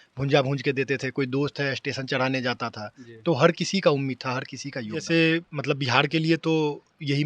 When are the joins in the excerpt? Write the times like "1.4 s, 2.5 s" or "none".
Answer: 5.0 s

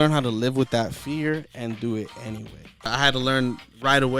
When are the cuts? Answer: 2.9 s

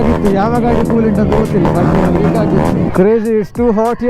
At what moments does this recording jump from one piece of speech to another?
2.9 s

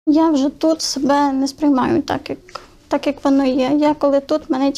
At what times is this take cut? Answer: none

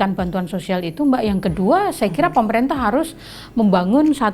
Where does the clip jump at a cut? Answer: none

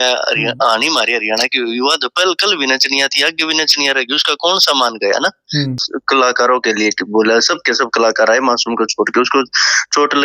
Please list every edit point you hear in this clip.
5.9 s

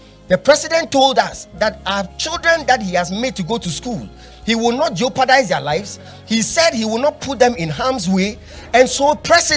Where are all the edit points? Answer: none

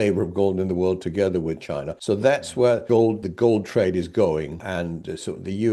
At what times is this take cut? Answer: 1.9 s, 3.0 s, 4.7 s

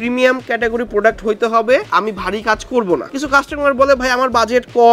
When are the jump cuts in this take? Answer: 1.9 s, 3.1 s

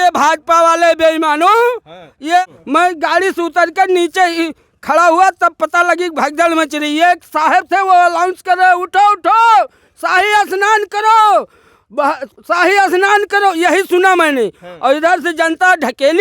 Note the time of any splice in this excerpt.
2.4 s

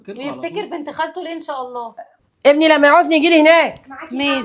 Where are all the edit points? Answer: 2.1 s

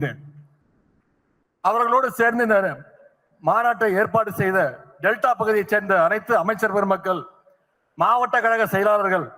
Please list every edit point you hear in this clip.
8.0 s

